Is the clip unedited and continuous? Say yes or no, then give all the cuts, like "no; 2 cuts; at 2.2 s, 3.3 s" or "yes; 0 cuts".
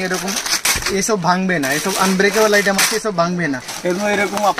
no; 1 cut; at 3.7 s